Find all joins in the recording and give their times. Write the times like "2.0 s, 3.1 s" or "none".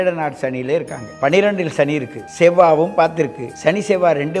1.0 s, 2.2 s, 3.5 s